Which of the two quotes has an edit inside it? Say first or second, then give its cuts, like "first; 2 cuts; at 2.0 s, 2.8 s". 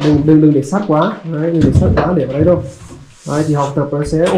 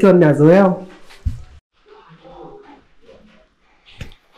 second; 1 cut; at 1.6 s